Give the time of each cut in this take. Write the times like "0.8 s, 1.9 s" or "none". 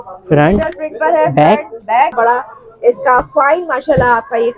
2.1 s